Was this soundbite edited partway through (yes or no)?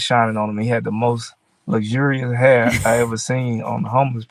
no